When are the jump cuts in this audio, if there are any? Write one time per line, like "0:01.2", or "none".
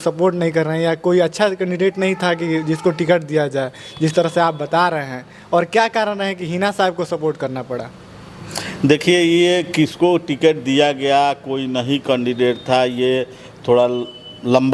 none